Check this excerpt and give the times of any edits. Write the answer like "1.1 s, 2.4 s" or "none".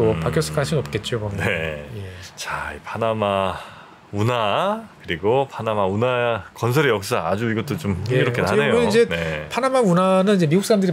none